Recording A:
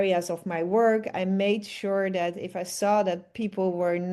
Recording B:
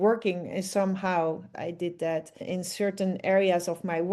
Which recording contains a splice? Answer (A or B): B